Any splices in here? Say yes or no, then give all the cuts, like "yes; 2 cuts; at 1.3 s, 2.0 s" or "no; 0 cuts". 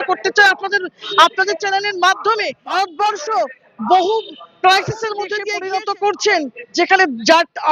yes; 2 cuts; at 2.6 s, 5.3 s